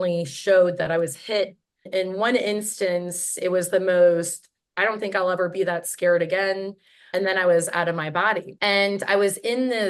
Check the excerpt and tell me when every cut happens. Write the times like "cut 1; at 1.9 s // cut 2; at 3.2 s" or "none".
cut 1; at 1.9 s // cut 2; at 7.0 s // cut 3; at 8.5 s